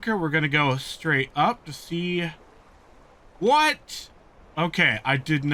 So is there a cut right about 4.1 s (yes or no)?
no